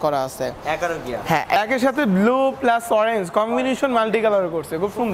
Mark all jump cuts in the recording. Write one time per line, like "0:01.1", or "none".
0:01.6